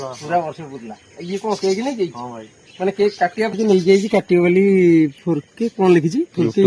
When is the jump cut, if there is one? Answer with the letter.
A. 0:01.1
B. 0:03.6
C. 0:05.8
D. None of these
B